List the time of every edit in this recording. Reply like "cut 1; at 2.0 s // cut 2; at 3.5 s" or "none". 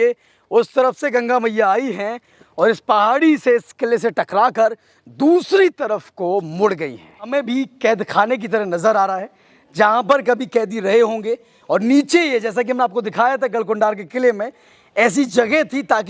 cut 1; at 7.3 s